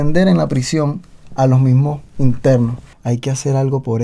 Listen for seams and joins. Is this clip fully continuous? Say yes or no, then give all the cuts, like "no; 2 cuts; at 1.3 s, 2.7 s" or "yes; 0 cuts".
no; 1 cut; at 2.9 s